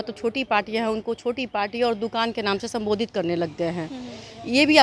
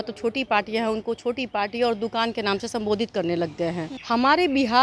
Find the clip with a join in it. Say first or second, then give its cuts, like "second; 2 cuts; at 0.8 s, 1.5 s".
second; 1 cut; at 3.9 s